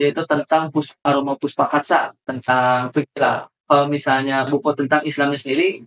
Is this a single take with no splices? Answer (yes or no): no